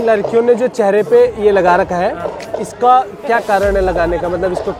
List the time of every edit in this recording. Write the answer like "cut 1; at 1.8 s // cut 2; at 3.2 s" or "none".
none